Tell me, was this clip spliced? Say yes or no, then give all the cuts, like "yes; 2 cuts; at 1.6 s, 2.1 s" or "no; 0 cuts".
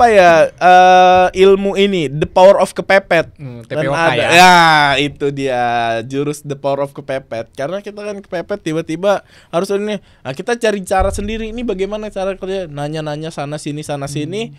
no; 0 cuts